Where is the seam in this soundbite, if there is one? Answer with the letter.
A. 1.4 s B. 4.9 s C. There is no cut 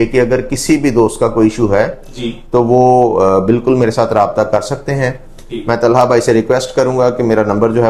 C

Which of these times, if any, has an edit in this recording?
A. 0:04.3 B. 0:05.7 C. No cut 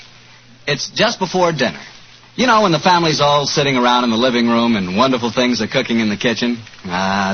A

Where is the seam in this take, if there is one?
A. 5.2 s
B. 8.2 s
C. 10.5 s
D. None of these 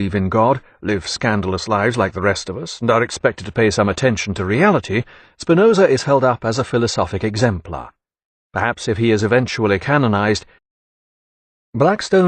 D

